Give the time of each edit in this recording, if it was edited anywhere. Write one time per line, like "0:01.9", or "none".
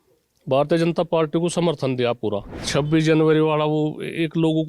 0:02.5